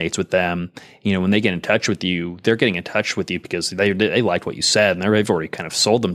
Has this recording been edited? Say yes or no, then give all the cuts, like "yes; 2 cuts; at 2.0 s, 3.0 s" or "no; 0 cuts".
no; 0 cuts